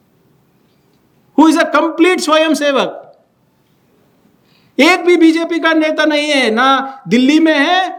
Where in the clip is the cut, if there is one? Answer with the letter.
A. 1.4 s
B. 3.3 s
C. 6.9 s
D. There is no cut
D